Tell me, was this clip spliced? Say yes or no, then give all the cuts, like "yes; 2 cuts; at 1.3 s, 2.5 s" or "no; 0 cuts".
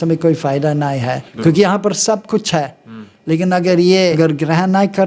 yes; 2 cuts; at 1.2 s, 4.1 s